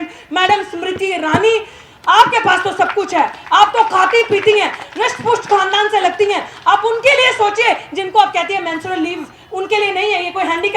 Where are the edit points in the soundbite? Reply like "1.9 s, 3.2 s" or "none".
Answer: none